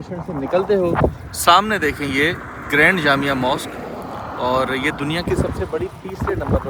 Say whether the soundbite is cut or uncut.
uncut